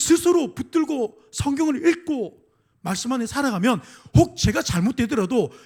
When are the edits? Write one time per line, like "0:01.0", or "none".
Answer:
none